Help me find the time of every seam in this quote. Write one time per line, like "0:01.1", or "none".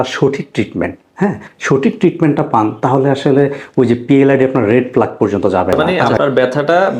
0:06.0